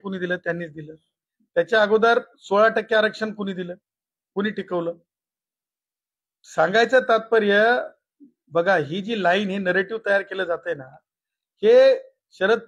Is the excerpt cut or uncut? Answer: uncut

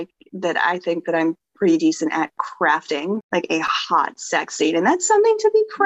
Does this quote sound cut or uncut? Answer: cut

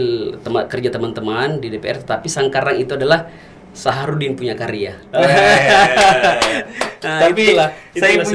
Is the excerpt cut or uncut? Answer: uncut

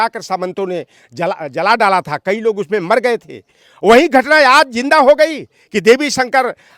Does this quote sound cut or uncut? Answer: uncut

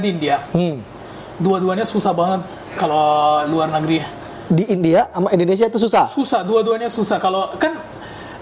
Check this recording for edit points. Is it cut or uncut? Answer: uncut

